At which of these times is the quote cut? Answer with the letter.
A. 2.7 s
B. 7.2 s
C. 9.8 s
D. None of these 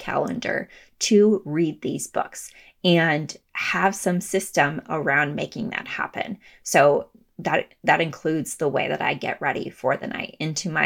D